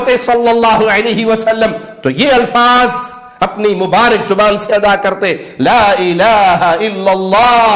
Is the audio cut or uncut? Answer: uncut